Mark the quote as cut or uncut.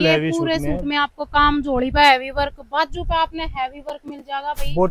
uncut